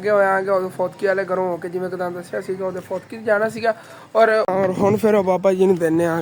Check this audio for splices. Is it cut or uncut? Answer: cut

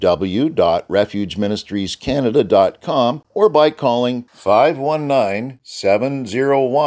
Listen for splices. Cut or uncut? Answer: cut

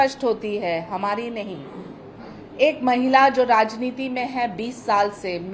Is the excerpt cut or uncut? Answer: uncut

